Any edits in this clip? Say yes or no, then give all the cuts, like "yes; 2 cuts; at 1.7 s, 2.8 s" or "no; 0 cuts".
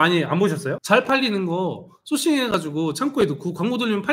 no; 0 cuts